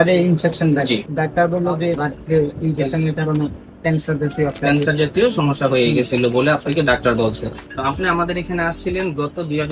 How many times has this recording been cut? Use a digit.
3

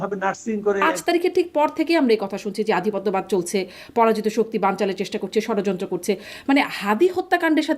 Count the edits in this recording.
1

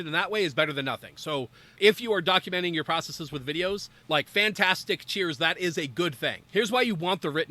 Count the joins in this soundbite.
2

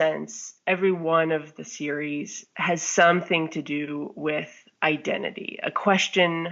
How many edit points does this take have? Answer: 0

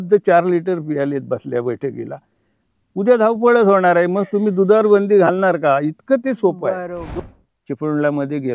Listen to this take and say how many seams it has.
1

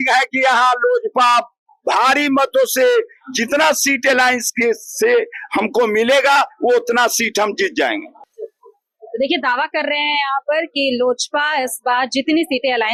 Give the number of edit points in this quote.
0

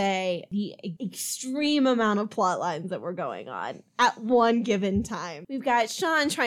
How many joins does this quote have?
1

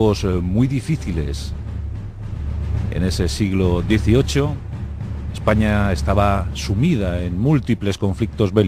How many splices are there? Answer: 0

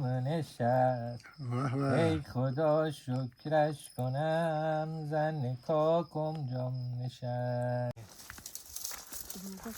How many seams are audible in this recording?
1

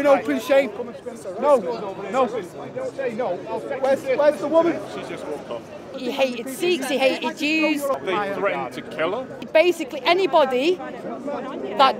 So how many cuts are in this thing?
3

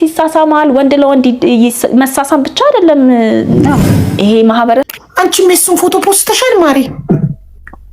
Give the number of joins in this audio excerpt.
1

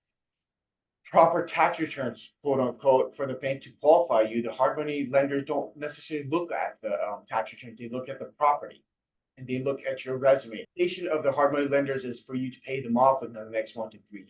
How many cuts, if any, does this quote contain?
1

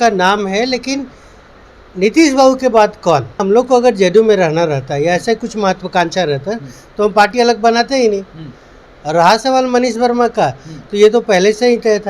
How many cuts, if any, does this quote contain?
1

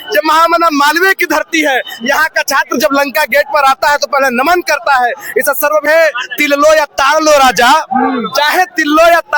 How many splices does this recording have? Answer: 1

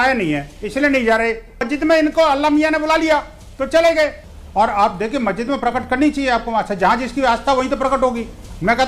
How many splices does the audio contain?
2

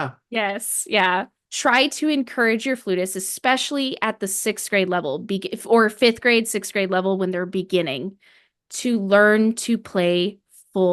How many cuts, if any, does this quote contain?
1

